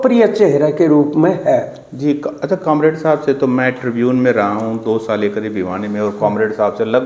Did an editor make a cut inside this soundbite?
no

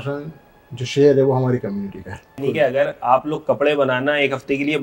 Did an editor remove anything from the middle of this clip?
yes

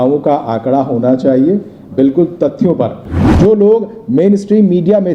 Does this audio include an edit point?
yes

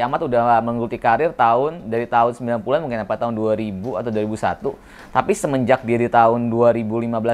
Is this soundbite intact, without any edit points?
yes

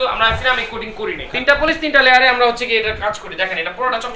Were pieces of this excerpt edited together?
yes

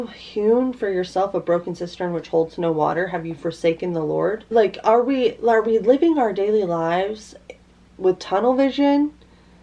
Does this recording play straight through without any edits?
no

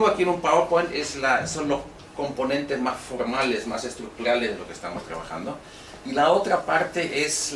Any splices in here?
yes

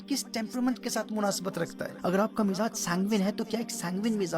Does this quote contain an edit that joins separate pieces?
yes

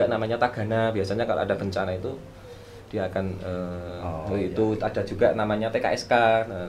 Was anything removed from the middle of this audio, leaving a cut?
no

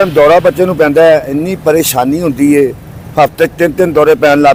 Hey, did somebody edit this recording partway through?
no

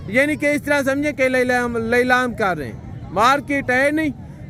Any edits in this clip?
no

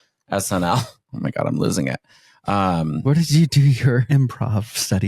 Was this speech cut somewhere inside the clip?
yes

